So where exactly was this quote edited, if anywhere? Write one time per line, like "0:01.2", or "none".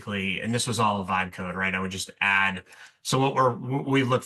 none